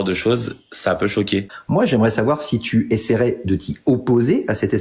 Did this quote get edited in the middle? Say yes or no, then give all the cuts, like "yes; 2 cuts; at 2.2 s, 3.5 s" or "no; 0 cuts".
yes; 1 cut; at 1.6 s